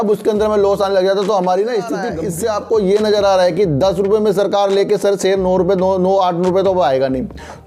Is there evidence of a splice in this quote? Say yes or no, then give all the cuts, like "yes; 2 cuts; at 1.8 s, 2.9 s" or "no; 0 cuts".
yes; 1 cut; at 2.2 s